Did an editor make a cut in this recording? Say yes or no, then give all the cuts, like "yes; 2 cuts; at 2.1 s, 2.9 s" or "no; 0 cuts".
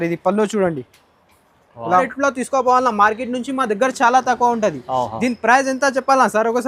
yes; 1 cut; at 2.0 s